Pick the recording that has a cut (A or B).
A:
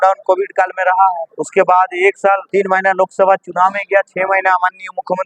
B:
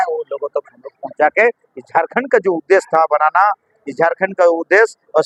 A